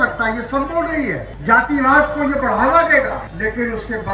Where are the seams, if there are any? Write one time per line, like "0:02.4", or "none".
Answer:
0:01.3
0:03.3